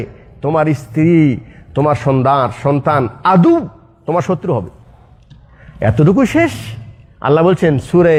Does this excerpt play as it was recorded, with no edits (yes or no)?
yes